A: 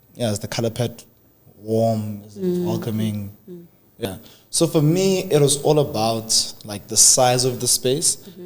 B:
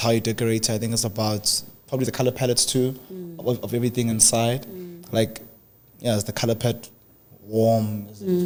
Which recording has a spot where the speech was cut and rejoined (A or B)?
A